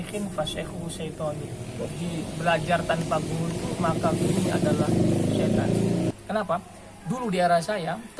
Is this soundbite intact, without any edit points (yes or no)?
no